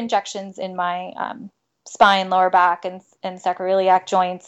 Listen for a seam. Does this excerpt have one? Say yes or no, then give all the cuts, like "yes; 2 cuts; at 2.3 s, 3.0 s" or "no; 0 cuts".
no; 0 cuts